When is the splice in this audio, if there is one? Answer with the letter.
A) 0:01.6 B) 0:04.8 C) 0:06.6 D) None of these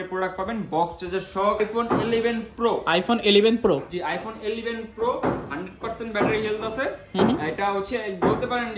A